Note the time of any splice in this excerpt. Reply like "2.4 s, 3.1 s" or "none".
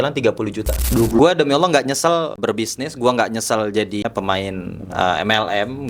1.2 s, 2.4 s, 4.0 s